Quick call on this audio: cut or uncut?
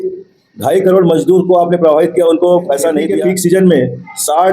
cut